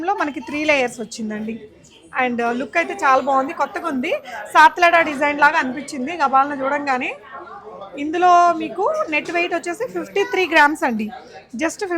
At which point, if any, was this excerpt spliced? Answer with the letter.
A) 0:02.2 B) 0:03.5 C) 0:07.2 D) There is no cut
D